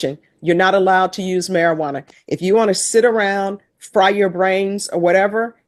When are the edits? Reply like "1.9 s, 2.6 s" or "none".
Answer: none